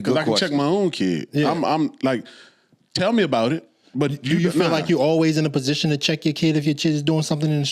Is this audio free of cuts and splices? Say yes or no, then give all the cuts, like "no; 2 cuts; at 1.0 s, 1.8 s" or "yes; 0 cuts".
yes; 0 cuts